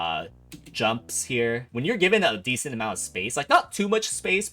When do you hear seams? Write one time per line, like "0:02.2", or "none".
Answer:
0:01.7

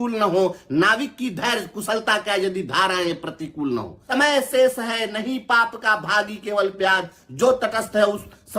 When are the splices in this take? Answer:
0:04.0

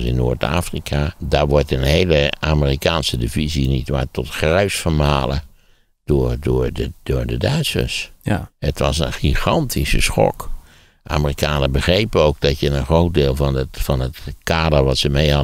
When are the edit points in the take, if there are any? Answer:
0:01.2

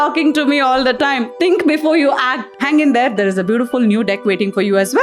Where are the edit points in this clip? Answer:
0:02.6

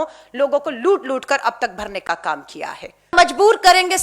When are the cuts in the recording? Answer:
0:03.1

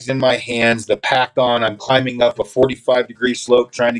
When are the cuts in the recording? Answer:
none

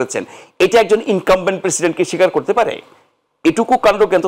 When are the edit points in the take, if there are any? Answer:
none

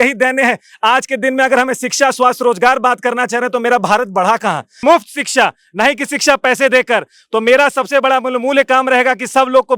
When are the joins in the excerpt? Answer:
0:04.8

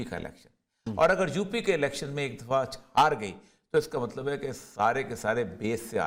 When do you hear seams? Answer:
none

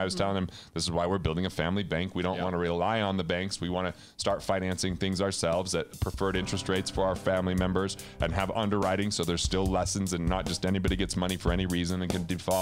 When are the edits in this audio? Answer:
none

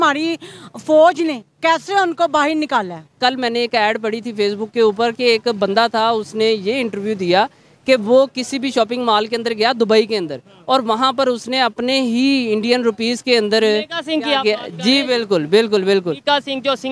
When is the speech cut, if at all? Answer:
0:03.2

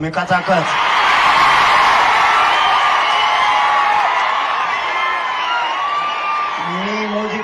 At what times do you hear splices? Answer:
none

